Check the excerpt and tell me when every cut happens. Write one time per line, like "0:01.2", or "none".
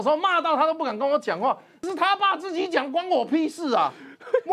0:01.8